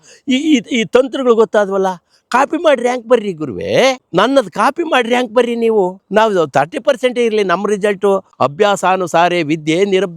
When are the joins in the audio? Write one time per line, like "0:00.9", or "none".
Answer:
0:04.0
0:08.3